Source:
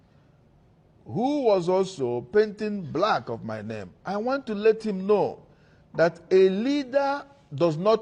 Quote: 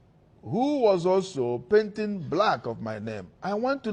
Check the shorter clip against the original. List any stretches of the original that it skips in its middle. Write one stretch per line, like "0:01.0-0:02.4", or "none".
none